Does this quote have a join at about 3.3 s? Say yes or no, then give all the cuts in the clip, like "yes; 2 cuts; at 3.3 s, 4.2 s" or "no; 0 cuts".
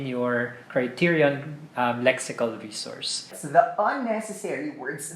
yes; 1 cut; at 3.3 s